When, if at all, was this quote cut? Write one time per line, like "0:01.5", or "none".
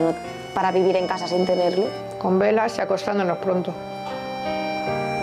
none